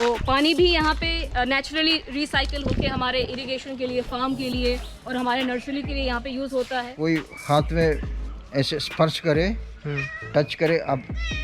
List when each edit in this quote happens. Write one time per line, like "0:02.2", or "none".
0:06.9